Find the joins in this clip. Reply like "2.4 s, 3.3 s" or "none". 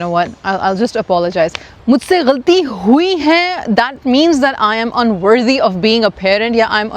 1.7 s